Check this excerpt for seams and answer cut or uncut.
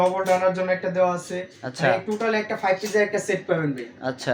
uncut